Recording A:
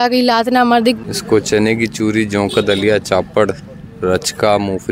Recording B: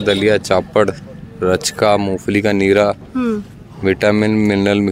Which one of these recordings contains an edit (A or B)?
A